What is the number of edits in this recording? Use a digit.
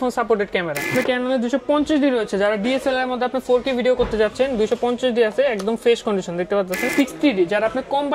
2